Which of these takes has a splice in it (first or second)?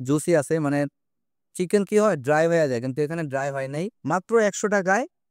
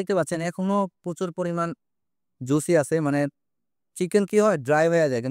first